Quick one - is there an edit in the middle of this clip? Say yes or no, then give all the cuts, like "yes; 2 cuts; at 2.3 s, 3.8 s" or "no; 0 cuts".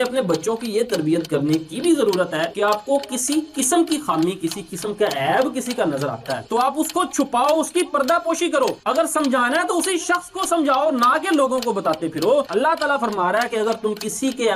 no; 0 cuts